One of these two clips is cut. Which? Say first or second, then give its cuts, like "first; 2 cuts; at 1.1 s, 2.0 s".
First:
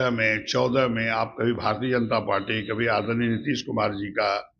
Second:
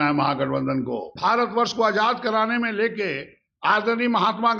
second; 1 cut; at 1.0 s